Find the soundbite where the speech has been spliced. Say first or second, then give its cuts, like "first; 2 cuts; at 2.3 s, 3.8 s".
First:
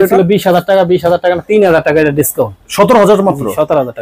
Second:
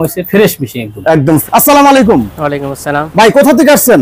second; 1 cut; at 1.4 s